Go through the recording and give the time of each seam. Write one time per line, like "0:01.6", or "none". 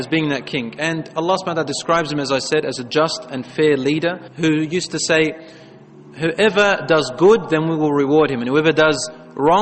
none